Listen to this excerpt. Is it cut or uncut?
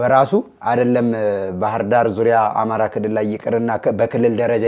uncut